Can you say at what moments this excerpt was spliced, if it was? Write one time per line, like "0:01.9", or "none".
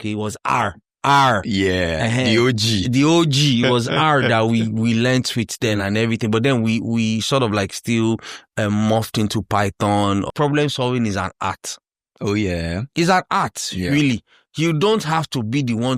0:10.3